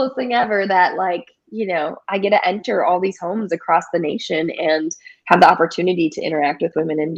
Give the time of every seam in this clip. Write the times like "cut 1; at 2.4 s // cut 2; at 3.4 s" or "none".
none